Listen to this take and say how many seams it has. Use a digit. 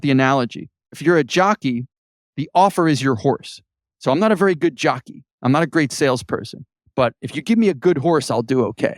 1